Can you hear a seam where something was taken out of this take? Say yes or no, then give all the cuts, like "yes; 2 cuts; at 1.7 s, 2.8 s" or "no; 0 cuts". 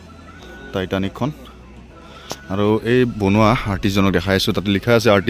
no; 0 cuts